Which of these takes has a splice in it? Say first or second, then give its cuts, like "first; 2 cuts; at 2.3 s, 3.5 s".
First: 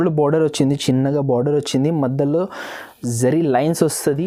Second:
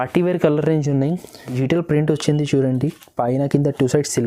second; 1 cut; at 1.5 s